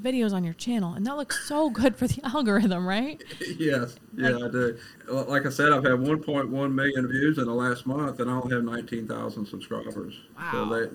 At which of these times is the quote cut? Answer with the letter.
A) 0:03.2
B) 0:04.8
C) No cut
B